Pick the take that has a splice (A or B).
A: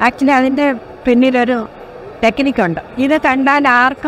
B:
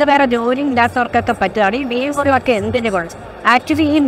A